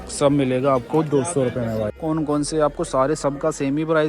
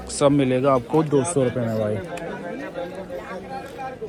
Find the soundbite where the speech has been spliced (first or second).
first